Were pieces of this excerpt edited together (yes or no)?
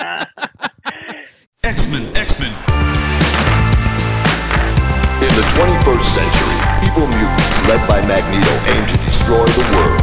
yes